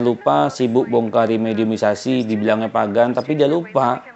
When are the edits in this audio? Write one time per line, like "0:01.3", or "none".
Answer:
none